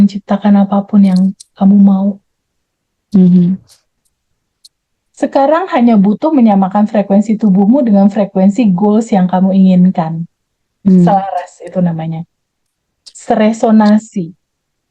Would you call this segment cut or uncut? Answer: cut